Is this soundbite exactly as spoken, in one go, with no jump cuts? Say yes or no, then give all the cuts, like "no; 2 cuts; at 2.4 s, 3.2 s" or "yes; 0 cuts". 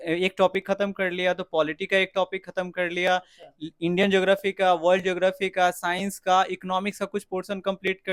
yes; 0 cuts